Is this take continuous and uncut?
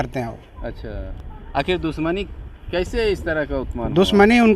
yes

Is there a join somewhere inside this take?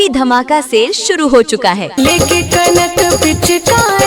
no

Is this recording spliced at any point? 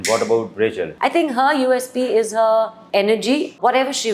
yes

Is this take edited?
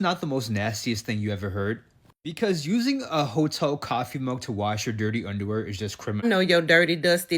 yes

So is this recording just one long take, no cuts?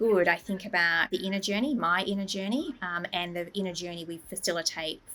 no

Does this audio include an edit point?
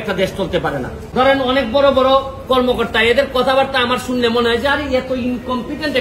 yes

